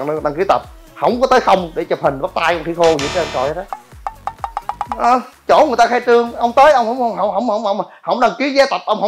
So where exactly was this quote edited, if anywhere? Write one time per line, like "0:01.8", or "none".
0:05.0